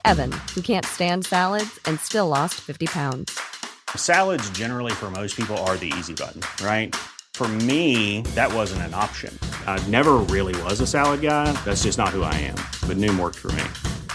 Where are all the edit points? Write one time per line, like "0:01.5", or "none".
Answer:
none